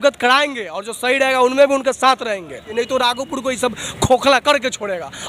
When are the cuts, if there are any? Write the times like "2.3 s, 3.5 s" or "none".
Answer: 2.7 s